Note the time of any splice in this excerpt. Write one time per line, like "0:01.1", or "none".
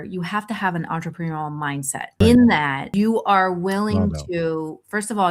0:02.2
0:02.8